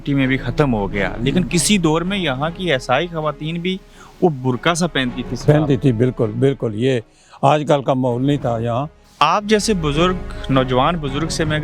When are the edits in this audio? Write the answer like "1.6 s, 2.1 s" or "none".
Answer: 9.0 s